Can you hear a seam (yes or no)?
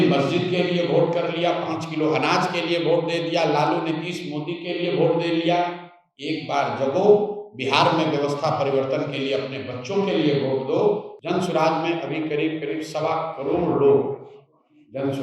yes